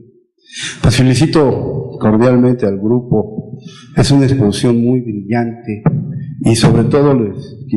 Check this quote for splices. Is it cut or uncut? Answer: cut